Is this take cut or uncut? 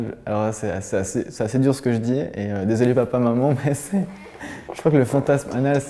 uncut